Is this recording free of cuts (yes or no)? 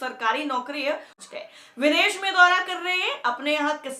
no